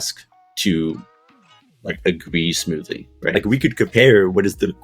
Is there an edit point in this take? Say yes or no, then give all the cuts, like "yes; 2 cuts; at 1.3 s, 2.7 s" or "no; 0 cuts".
yes; 1 cut; at 3.3 s